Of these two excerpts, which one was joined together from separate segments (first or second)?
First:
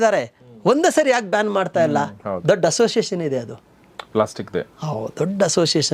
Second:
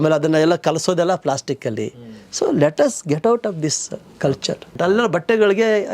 second